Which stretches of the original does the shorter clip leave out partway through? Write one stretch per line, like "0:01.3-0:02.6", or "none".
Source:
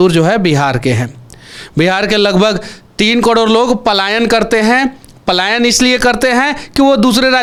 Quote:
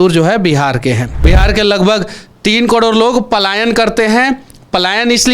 0:01.1-0:01.7